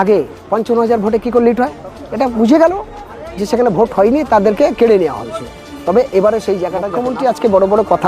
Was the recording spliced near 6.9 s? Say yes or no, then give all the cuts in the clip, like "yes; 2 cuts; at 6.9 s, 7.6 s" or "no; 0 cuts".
yes; 1 cut; at 6.9 s